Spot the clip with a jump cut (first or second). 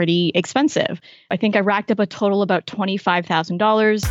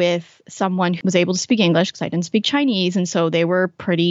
first